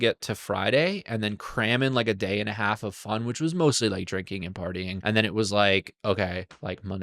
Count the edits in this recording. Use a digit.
1